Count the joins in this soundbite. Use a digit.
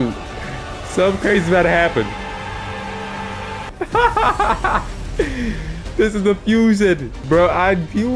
2